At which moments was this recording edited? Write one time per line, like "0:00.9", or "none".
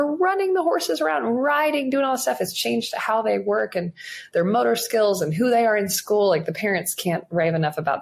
none